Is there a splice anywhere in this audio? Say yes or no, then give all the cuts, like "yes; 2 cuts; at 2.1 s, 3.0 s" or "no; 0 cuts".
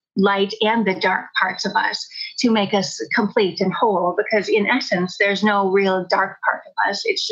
no; 0 cuts